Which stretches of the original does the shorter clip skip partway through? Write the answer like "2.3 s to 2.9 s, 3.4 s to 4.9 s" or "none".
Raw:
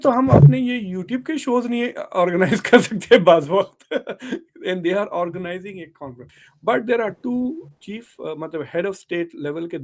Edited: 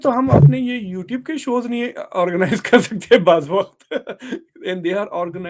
none